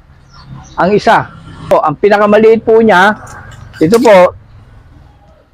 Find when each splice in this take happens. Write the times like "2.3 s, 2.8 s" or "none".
1.7 s